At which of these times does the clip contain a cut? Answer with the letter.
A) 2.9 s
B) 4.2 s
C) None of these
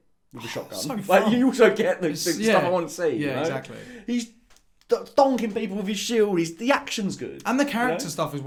C